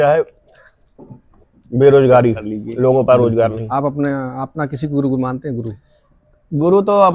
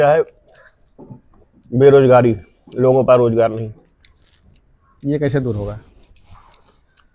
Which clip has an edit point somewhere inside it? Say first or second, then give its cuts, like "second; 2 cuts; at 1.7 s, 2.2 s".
first; 1 cut; at 3.6 s